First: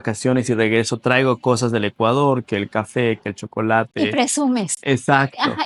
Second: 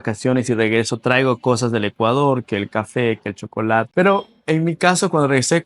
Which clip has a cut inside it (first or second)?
second